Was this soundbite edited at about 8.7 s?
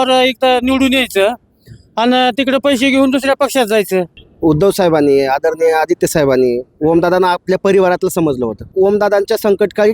yes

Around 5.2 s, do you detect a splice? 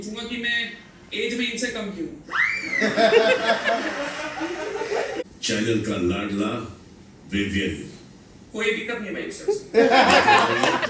yes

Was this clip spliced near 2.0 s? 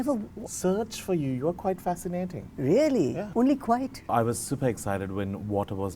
no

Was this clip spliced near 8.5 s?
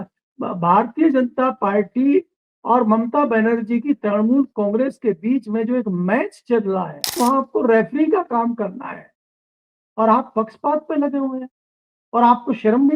no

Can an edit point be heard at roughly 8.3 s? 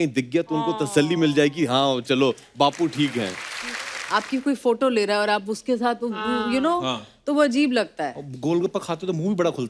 no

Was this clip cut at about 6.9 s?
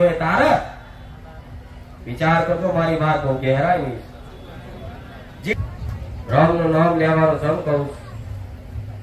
no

